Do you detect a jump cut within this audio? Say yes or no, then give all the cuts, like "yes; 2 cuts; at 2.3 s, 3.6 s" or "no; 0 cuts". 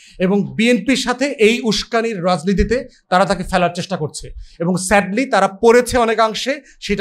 no; 0 cuts